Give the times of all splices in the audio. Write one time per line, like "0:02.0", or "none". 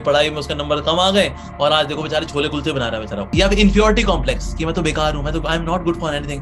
0:01.4
0:03.3